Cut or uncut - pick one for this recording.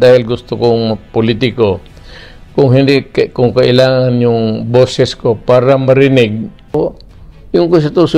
cut